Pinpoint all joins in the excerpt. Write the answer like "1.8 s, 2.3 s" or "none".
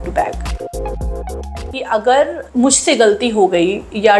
1.8 s